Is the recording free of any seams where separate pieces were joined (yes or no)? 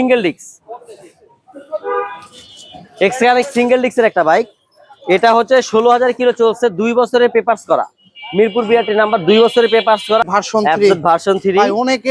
no